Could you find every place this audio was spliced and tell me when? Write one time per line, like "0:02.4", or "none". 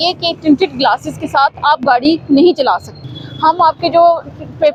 none